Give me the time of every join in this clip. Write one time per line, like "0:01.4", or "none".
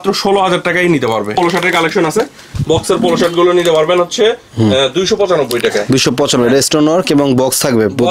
0:01.4